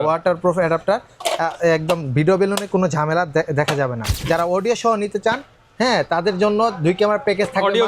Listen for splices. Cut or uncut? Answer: cut